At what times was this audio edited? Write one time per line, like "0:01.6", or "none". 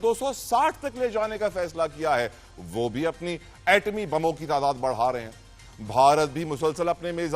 none